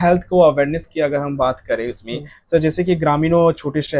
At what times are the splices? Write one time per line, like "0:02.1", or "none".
none